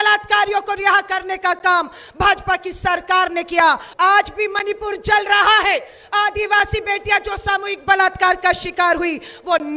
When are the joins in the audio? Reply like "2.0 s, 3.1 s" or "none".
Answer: 3.9 s

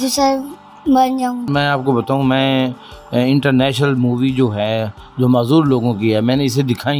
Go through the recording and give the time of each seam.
1.5 s

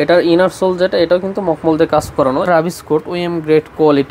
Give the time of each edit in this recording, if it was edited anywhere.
2.4 s

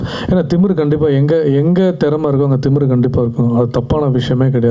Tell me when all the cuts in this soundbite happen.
none

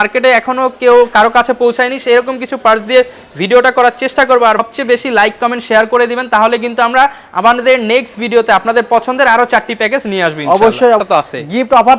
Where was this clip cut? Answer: 4.6 s, 11.0 s

